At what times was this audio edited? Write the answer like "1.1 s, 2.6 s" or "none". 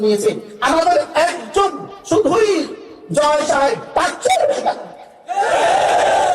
none